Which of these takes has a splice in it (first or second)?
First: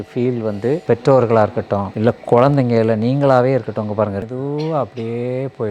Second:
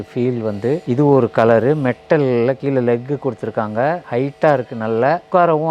first